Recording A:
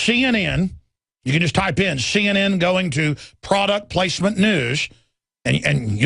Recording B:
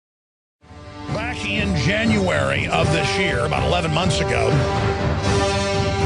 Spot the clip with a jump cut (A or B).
A